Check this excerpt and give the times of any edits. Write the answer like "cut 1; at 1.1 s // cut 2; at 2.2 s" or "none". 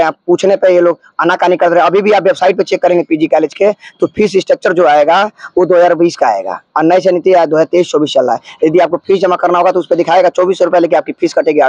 none